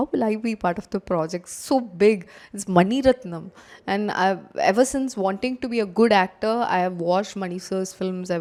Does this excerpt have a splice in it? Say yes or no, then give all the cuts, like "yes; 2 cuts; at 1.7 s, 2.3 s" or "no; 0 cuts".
no; 0 cuts